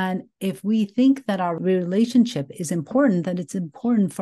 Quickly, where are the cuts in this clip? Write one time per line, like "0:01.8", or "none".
0:01.5